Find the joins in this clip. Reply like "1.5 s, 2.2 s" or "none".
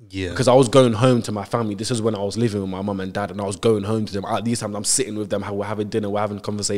none